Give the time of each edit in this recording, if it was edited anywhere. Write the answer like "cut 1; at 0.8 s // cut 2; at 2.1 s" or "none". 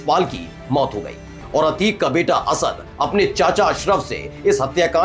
cut 1; at 1.3 s